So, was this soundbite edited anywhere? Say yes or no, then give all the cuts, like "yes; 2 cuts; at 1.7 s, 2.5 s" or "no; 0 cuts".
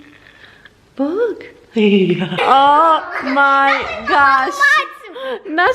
yes; 1 cut; at 2.3 s